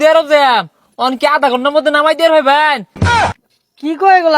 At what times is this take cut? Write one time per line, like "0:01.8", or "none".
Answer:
0:03.3